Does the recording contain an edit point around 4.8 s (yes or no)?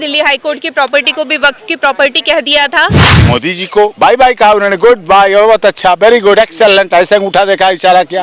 no